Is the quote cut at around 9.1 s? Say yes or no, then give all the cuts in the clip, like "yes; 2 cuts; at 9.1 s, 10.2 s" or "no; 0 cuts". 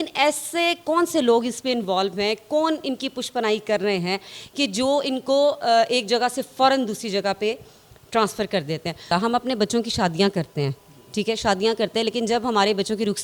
yes; 1 cut; at 9.1 s